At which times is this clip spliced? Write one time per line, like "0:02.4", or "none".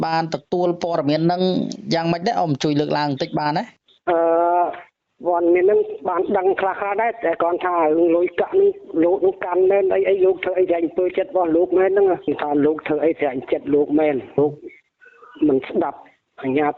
none